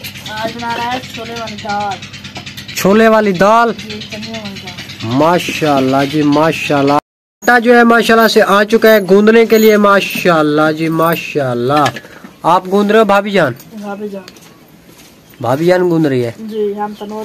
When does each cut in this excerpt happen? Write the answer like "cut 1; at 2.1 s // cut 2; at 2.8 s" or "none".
cut 1; at 7.0 s

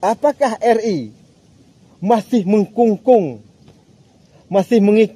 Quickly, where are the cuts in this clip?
none

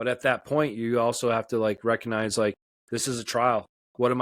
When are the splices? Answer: cut 1; at 2.7 s

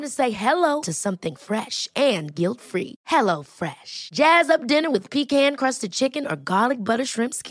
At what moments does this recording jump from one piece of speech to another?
none

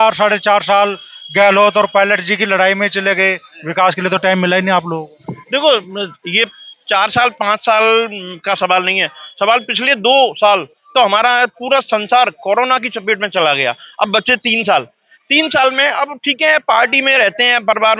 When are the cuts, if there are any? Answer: none

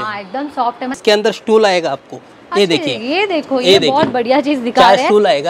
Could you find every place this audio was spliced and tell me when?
cut 1; at 1.0 s

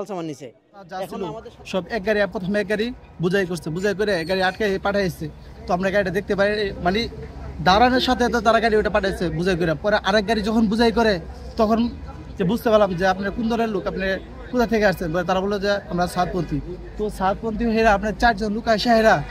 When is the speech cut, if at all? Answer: cut 1; at 1.2 s

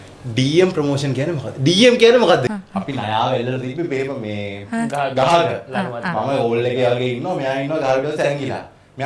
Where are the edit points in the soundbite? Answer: cut 1; at 2.5 s

